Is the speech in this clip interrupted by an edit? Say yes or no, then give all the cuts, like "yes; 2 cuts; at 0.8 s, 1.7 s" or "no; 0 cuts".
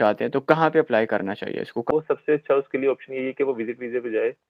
yes; 1 cut; at 1.9 s